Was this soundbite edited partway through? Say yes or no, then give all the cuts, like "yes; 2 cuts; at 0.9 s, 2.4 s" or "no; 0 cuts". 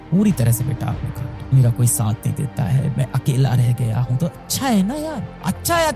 yes; 1 cut; at 1.1 s